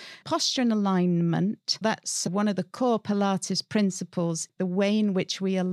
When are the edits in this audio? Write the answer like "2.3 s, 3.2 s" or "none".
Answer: 1.8 s, 4.4 s